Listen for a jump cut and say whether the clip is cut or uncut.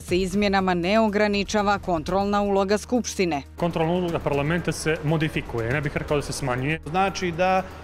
cut